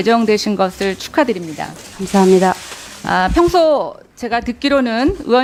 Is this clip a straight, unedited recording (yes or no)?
yes